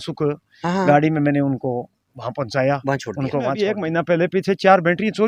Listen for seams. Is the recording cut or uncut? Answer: cut